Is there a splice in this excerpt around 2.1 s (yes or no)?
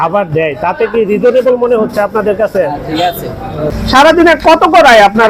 no